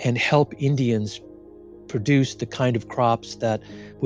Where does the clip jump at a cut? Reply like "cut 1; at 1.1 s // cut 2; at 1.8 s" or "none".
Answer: none